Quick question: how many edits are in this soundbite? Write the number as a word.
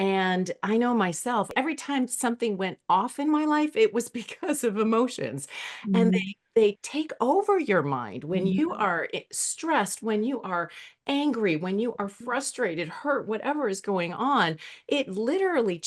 one